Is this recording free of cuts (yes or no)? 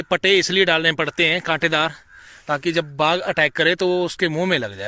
yes